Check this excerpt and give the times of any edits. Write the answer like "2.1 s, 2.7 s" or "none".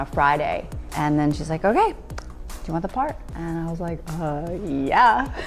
0.9 s, 3.3 s